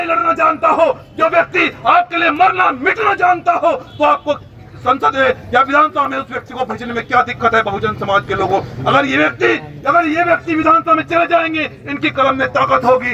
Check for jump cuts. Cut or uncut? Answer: uncut